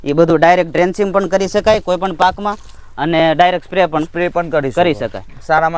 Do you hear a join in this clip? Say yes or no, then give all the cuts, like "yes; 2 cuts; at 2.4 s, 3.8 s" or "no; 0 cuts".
no; 0 cuts